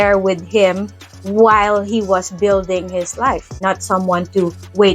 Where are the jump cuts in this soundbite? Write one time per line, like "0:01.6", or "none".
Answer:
0:03.6